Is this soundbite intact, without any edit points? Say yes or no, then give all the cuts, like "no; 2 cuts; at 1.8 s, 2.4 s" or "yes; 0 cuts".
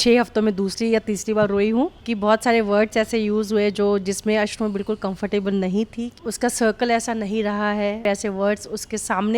no; 3 cuts; at 2.0 s, 6.1 s, 8.0 s